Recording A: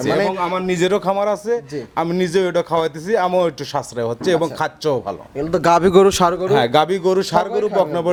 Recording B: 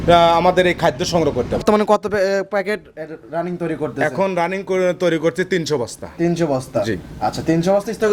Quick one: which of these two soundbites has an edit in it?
B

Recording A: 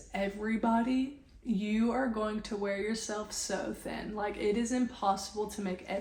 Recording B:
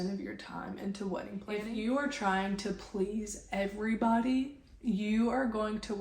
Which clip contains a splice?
B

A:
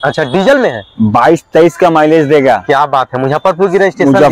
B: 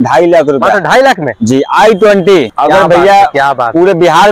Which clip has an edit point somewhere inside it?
B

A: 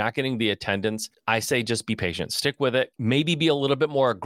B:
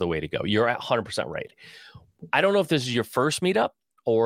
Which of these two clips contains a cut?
A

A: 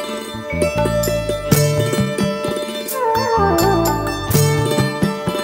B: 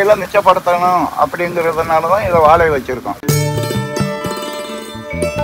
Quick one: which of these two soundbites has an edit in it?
B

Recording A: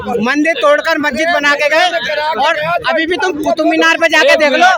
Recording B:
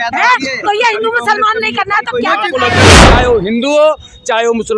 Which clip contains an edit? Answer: B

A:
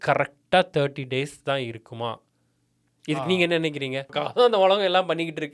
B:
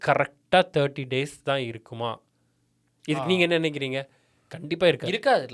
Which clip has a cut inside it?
A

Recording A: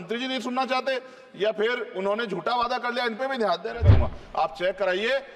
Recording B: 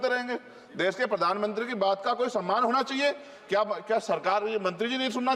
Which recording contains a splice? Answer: A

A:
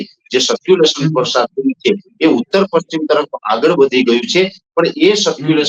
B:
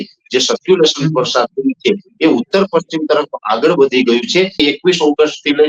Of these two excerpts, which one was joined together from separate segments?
B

